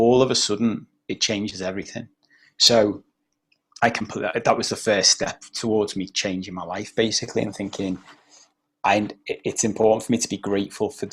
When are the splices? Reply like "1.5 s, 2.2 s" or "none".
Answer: none